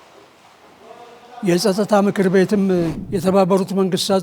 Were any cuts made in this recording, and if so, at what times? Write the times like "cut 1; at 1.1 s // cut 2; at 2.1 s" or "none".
cut 1; at 3.0 s